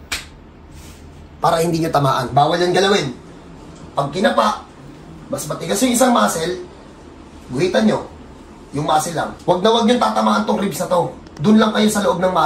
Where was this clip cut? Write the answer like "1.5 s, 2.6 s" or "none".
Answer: 9.3 s